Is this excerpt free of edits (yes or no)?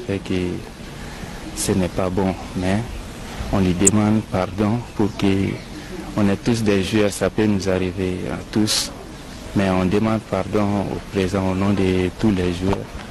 yes